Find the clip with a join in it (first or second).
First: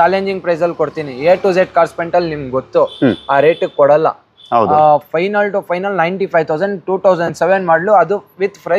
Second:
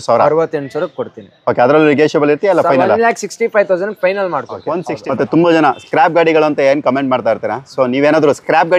second